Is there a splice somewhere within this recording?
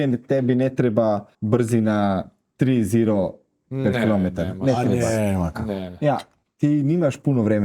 yes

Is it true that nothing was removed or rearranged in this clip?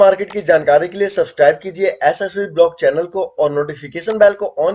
yes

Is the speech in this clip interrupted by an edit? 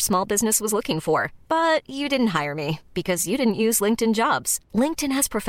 no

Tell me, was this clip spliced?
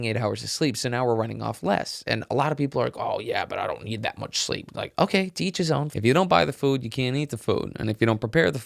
yes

